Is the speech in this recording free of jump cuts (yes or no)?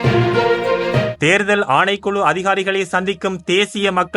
no